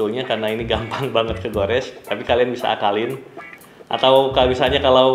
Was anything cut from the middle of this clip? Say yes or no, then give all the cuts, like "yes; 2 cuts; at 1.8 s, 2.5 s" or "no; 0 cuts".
no; 0 cuts